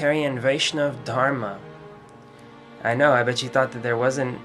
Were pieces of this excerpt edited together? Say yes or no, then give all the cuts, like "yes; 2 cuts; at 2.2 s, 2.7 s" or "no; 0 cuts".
yes; 1 cut; at 2.1 s